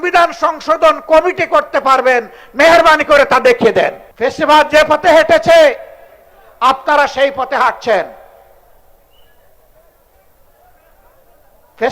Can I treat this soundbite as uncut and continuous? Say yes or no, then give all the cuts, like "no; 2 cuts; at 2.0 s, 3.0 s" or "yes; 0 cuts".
no; 1 cut; at 4.0 s